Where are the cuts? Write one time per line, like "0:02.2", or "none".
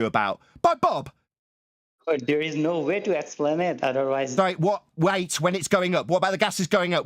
none